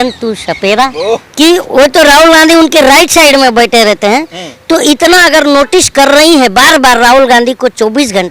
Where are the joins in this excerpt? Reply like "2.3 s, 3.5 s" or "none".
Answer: 1.2 s